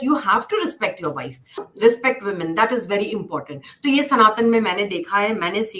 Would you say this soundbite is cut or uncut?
cut